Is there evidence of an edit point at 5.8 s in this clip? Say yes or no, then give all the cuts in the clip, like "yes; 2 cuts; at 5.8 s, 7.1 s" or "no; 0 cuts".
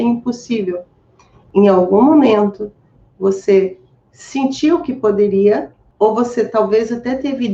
yes; 1 cut; at 5.8 s